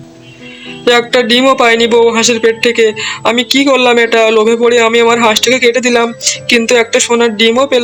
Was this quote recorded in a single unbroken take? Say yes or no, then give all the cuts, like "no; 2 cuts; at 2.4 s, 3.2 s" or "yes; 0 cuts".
yes; 0 cuts